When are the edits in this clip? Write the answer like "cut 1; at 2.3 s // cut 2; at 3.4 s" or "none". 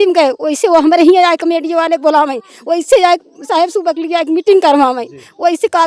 none